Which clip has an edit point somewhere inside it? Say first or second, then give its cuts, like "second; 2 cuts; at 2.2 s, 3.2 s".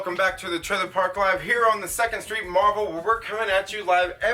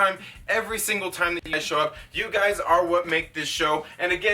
second; 1 cut; at 1.5 s